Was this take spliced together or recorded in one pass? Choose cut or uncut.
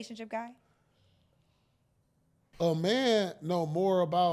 cut